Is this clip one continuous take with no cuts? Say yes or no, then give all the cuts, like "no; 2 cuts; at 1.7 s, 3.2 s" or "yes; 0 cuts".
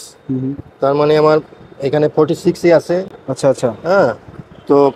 yes; 0 cuts